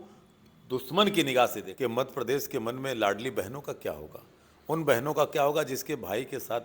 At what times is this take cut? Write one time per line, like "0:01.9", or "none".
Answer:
0:01.7